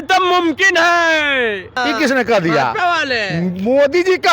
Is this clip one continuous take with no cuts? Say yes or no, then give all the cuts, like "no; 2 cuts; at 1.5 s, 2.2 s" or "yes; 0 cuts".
no; 1 cut; at 1.7 s